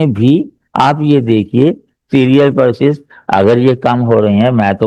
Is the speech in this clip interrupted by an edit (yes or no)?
no